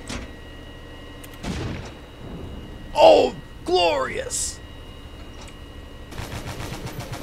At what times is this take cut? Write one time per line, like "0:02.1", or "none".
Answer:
0:06.1